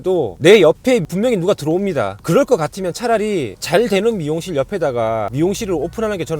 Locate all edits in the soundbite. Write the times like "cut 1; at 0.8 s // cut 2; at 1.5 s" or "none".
cut 1; at 5.3 s

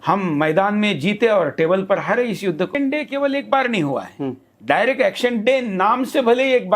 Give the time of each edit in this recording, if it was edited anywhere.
cut 1; at 2.7 s

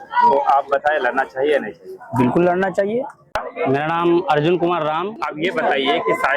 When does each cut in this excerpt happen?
cut 1; at 3.4 s // cut 2; at 5.2 s

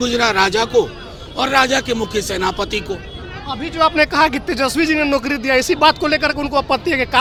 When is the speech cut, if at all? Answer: none

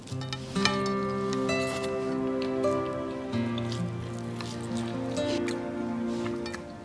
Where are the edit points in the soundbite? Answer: none

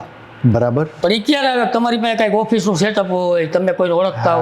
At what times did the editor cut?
cut 1; at 0.9 s

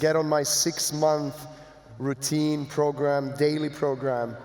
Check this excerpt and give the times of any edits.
none

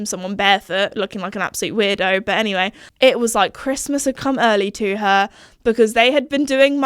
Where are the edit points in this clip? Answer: cut 1; at 2.8 s

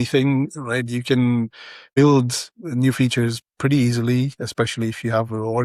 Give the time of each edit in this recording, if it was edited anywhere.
cut 1; at 2.0 s

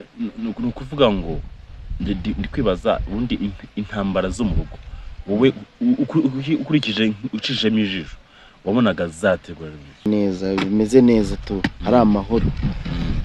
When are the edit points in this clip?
cut 1; at 10.1 s

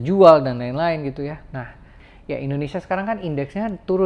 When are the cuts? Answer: cut 1; at 2.0 s

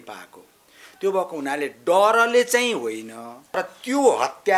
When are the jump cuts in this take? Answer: cut 1; at 3.6 s

